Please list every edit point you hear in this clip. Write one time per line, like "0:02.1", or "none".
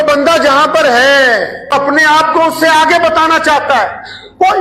0:01.7